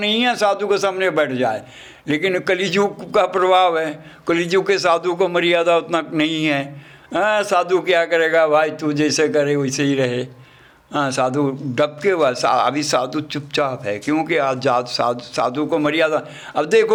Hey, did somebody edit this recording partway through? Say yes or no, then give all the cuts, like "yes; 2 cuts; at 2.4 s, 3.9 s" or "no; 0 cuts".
no; 0 cuts